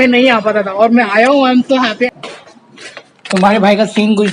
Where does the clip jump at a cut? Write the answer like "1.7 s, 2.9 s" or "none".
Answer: 2.1 s